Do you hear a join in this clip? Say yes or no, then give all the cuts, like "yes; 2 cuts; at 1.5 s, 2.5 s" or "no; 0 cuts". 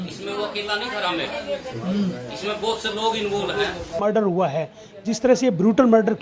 yes; 1 cut; at 4.0 s